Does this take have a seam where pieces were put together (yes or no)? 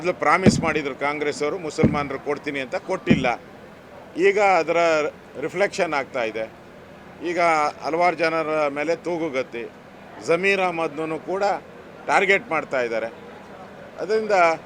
no